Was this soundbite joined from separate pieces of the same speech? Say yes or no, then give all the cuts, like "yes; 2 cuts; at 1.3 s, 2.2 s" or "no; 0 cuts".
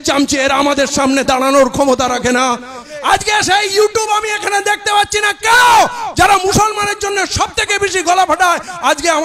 yes; 1 cut; at 2.9 s